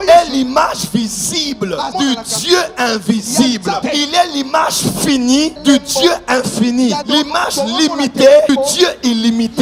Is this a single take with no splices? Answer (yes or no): yes